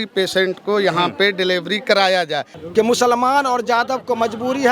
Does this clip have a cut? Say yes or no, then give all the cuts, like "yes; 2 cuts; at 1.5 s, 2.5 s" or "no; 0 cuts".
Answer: yes; 1 cut; at 2.5 s